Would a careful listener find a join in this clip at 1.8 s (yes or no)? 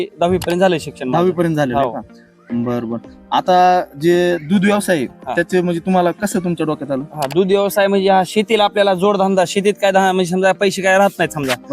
no